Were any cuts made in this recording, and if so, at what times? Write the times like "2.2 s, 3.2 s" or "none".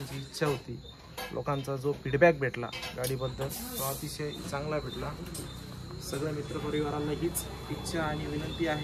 none